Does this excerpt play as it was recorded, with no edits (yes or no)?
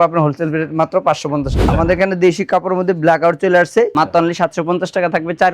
no